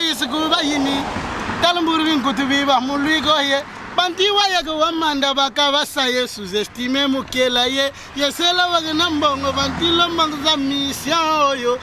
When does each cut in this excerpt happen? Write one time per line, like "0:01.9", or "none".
none